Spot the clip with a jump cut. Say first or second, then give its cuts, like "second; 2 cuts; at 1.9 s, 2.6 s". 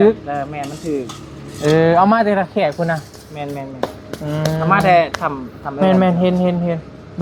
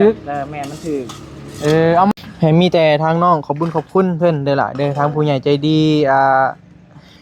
second; 1 cut; at 2.1 s